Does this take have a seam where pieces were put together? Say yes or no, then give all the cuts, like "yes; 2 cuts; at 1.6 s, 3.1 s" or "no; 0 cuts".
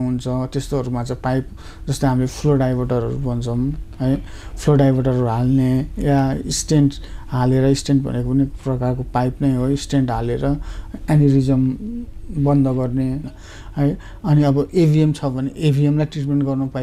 yes; 1 cut; at 13.3 s